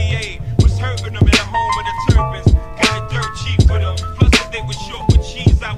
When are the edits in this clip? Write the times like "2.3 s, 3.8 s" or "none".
none